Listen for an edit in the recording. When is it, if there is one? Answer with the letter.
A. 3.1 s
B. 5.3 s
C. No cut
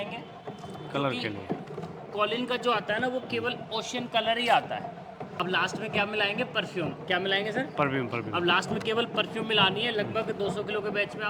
B